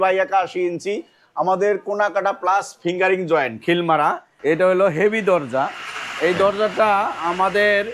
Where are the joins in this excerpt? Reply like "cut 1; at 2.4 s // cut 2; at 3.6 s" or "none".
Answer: cut 1; at 4.3 s